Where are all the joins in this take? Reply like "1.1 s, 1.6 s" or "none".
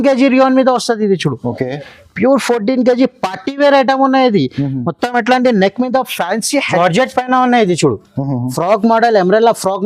6.8 s